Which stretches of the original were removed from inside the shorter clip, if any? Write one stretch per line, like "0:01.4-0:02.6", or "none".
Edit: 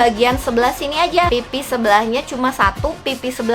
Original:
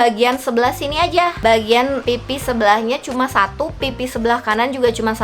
0:01.3-0:02.1